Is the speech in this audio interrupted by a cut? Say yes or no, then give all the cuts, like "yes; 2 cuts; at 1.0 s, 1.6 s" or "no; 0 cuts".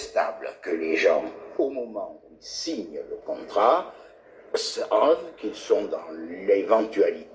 no; 0 cuts